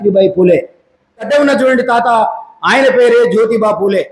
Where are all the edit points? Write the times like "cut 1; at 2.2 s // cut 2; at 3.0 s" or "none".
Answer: cut 1; at 1.3 s